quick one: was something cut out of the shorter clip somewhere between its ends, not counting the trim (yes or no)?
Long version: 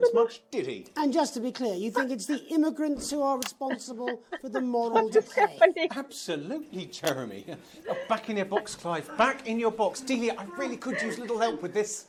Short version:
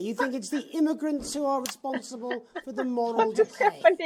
no